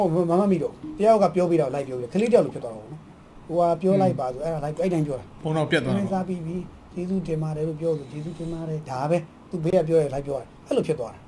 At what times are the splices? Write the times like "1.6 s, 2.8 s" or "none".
9.7 s